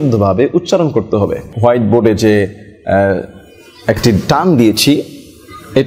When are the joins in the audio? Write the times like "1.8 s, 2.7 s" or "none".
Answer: 1.4 s